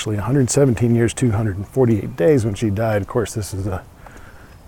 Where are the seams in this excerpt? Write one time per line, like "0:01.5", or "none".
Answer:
none